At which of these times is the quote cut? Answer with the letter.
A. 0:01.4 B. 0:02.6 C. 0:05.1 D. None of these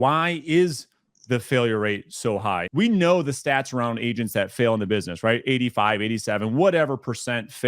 B